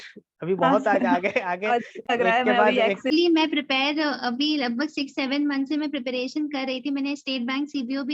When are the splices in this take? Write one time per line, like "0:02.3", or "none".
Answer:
0:03.0